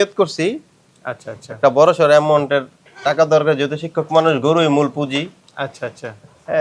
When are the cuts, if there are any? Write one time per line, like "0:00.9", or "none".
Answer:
none

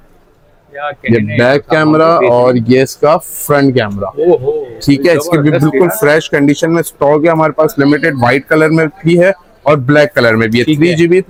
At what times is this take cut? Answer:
none

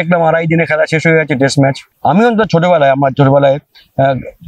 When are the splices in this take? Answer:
0:01.9

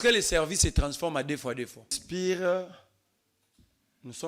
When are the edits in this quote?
0:02.0

